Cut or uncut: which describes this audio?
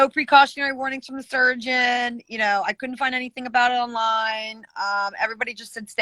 uncut